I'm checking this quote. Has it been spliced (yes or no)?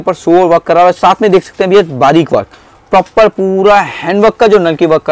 no